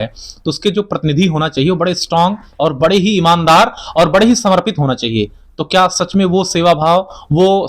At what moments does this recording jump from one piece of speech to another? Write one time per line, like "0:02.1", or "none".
none